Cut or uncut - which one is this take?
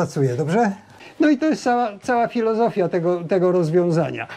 cut